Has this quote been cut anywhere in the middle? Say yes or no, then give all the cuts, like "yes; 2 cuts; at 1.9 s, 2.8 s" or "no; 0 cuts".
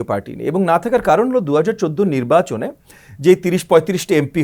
no; 0 cuts